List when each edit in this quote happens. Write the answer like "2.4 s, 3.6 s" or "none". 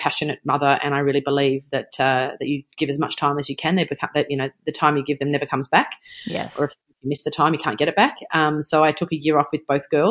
none